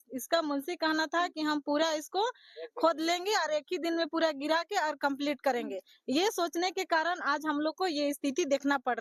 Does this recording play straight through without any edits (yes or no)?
yes